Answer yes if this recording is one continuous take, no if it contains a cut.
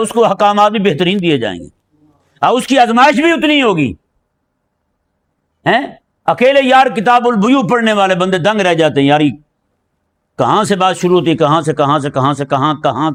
yes